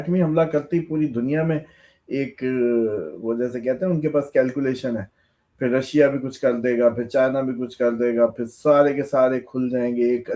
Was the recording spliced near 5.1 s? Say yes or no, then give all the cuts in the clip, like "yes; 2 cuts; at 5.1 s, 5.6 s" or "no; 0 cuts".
no; 0 cuts